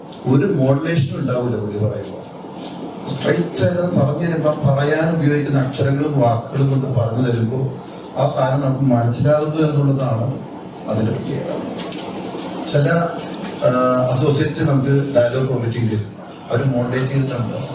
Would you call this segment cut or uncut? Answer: uncut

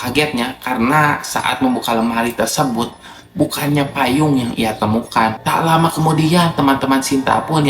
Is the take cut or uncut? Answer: cut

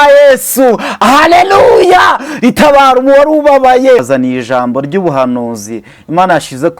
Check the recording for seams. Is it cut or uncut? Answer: cut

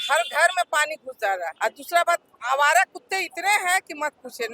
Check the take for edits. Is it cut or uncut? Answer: cut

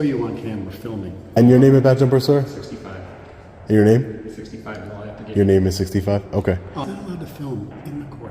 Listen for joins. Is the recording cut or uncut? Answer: cut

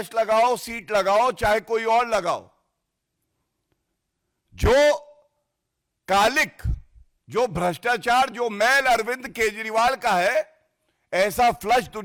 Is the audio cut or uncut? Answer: uncut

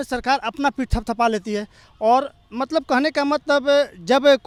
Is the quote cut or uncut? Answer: uncut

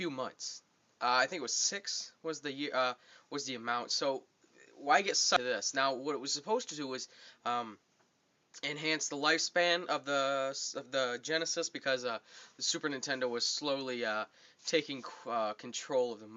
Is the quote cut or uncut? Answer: cut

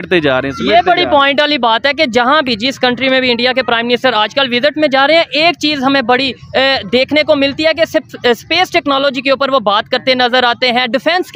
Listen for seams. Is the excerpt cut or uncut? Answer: uncut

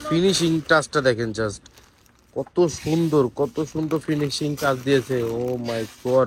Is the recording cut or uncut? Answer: uncut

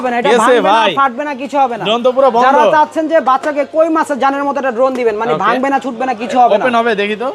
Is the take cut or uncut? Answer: uncut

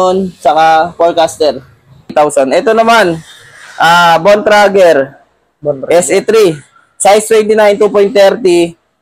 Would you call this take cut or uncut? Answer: cut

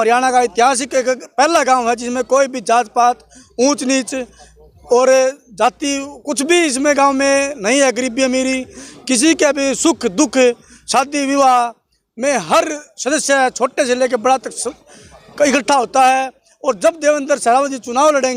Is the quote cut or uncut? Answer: uncut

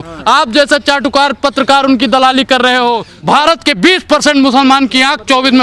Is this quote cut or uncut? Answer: cut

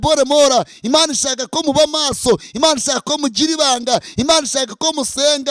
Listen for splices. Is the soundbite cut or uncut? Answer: uncut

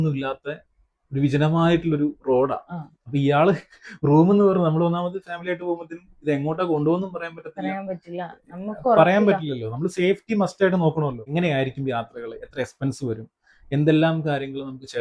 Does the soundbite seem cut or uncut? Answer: cut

